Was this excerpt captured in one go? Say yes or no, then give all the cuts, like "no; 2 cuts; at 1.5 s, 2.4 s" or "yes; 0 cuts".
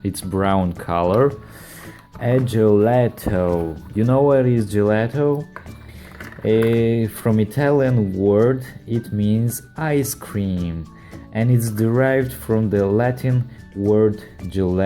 no; 1 cut; at 14.0 s